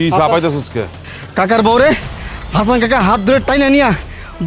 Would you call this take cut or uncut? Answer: cut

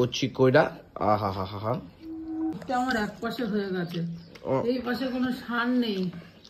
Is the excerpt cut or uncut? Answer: cut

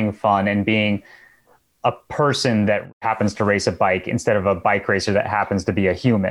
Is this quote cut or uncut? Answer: uncut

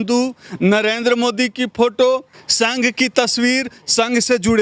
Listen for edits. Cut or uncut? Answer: cut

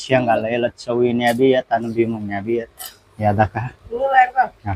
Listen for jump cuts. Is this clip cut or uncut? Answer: uncut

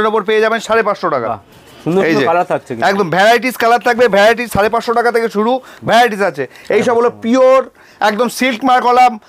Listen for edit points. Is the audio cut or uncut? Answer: uncut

